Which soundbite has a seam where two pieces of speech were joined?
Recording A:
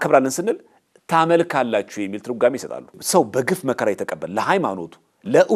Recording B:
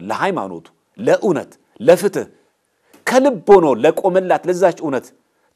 A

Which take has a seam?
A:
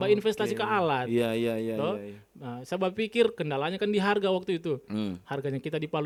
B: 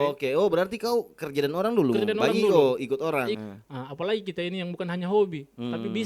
B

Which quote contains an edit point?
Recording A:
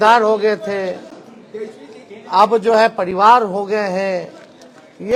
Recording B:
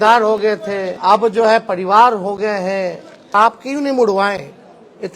B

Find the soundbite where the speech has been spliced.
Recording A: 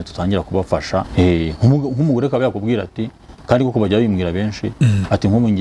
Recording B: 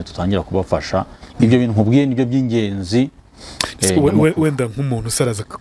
A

